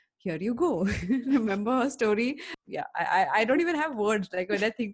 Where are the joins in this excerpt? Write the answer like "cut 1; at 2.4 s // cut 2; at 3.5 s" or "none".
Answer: cut 1; at 2.5 s